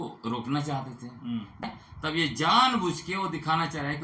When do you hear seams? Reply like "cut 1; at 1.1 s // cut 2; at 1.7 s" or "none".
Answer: cut 1; at 1.6 s